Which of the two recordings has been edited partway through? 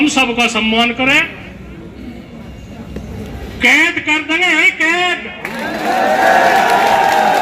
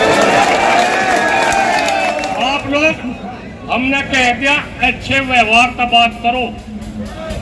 second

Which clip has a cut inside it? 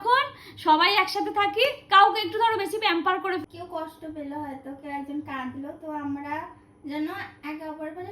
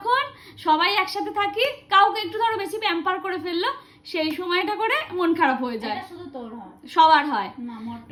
first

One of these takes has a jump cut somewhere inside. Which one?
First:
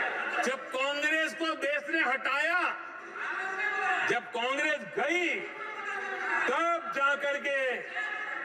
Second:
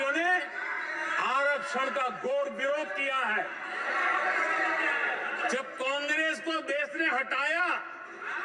second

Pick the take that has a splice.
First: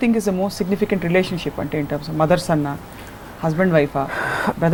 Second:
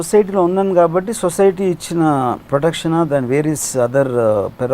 second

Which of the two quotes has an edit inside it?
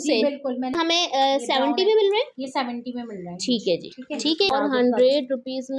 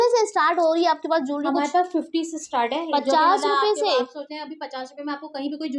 first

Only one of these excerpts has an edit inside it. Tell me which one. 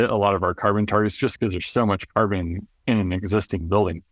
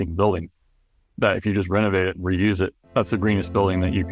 second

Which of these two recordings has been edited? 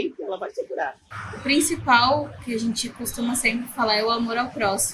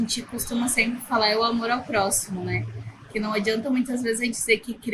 first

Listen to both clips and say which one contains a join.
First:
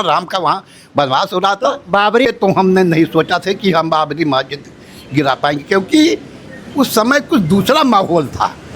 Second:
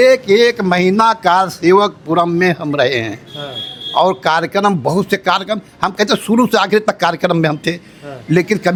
first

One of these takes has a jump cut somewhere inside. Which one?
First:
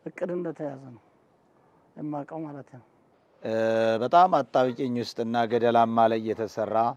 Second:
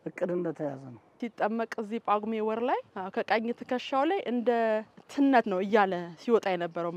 second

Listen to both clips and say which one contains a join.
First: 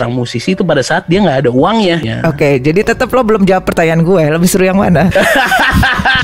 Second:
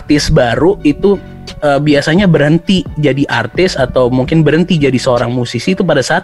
first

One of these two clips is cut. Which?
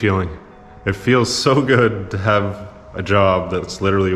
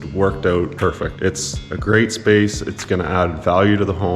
second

